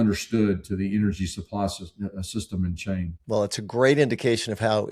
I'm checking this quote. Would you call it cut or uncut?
uncut